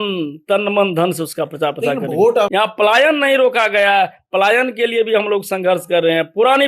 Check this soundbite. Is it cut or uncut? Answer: cut